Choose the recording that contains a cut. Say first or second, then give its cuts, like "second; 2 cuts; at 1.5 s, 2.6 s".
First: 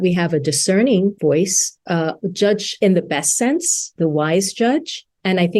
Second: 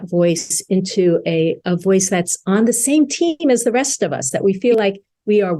first; 3 cuts; at 1.2 s, 2.7 s, 3.9 s